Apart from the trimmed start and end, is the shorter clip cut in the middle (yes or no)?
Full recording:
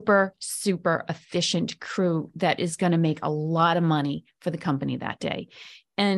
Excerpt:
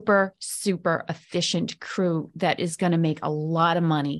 no